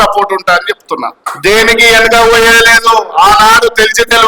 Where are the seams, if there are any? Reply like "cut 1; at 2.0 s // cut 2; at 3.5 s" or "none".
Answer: cut 1; at 1.2 s

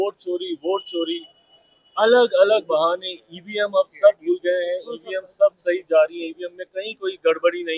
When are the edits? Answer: none

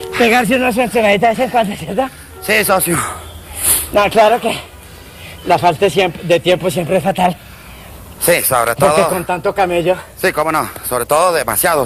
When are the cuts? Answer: cut 1; at 8.1 s

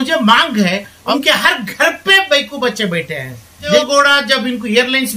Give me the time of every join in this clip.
cut 1; at 1.1 s // cut 2; at 3.7 s

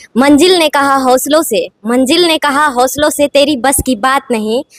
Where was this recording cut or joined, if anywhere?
none

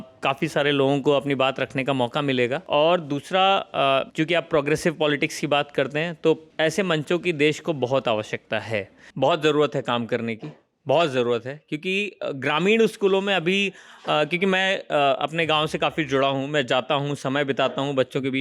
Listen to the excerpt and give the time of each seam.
cut 1; at 2.6 s // cut 2; at 4.1 s // cut 3; at 6.5 s // cut 4; at 9.0 s

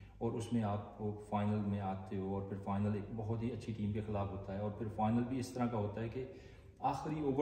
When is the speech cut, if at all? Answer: none

